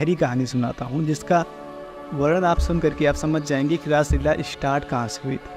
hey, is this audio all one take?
yes; 0 cuts

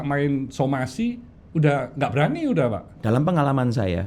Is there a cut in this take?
yes; 1 cut; at 2.9 s

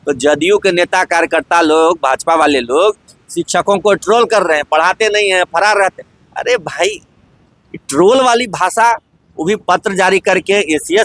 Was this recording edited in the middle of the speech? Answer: no; 0 cuts

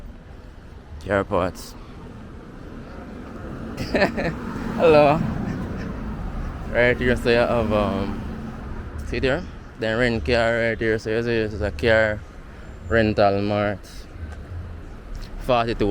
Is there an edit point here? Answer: no; 0 cuts

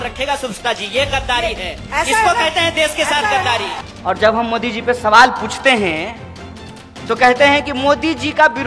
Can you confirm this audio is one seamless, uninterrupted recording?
no; 1 cut; at 3.8 s

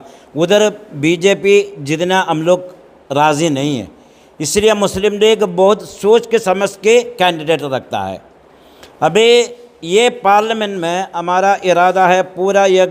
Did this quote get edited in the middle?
no; 0 cuts

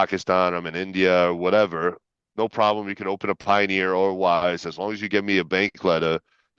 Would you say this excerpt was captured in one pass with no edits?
yes; 0 cuts

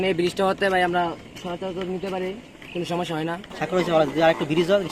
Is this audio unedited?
no; 1 cut; at 3.5 s

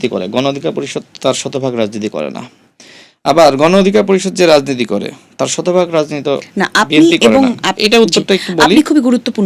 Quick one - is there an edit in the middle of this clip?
no; 0 cuts

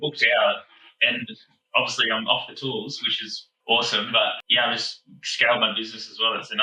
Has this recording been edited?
no; 0 cuts

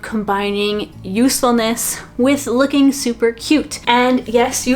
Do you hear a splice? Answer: yes; 1 cut; at 3.7 s

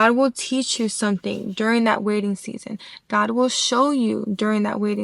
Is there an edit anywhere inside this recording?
no; 0 cuts

